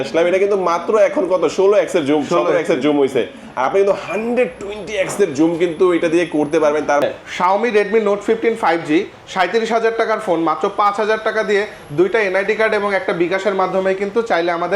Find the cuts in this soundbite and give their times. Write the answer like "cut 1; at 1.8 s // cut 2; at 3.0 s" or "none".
cut 1; at 7.0 s